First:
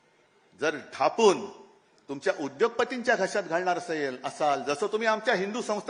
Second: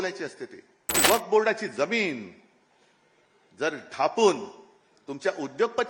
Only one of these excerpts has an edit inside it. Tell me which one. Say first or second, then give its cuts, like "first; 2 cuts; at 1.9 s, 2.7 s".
second; 1 cut; at 1.0 s